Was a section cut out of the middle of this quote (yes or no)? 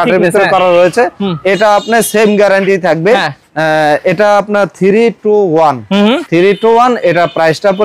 no